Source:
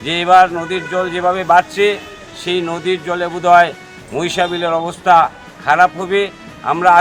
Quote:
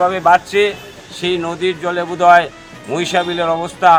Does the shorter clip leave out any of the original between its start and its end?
no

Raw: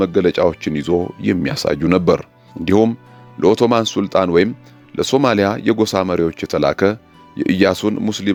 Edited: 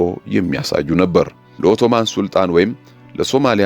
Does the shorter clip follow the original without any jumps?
no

